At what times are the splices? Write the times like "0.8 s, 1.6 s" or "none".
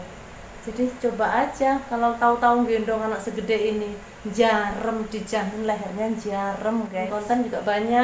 7.1 s